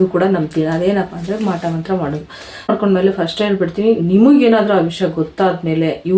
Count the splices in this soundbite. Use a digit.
1